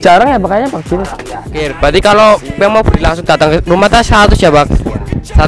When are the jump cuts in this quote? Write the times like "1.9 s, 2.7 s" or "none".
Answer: 1.7 s